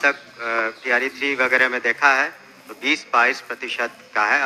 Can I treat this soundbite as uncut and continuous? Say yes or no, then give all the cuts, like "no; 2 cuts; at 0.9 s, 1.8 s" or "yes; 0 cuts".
yes; 0 cuts